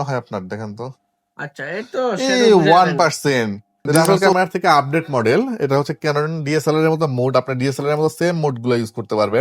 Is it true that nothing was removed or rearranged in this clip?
no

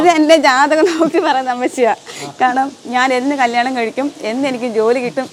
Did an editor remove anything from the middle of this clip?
no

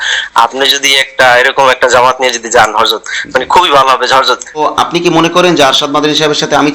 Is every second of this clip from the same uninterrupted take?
no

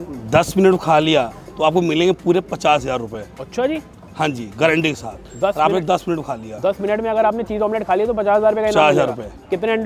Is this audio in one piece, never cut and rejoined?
yes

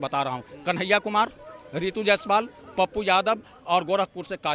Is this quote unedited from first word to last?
yes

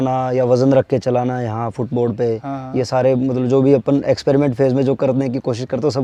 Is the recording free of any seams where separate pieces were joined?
yes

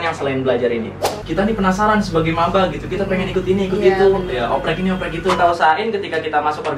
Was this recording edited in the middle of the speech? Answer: yes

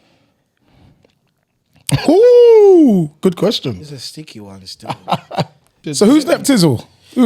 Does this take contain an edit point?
yes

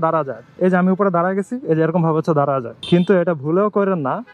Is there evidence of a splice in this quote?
yes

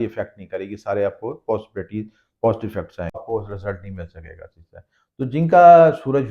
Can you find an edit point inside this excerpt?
yes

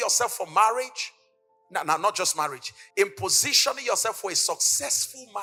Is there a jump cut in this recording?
no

